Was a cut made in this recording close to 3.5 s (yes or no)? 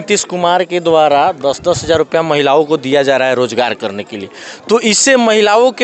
no